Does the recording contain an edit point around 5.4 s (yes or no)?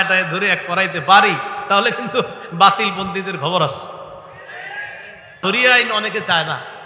yes